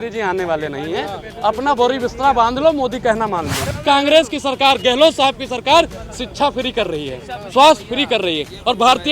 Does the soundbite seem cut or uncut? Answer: cut